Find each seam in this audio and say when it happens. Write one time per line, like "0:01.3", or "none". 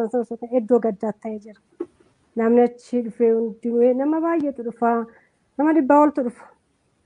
0:03.1